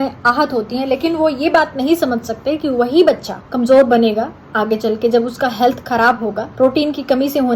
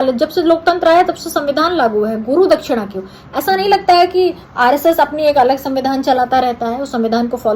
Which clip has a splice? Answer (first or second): first